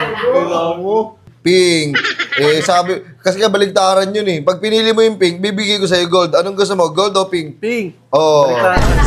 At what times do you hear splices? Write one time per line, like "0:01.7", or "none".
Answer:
0:01.3